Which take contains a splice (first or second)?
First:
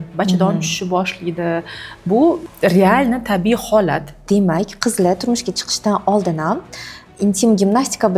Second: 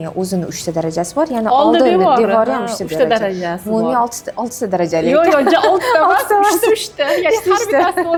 first